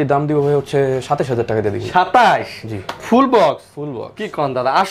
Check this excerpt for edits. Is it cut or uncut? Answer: uncut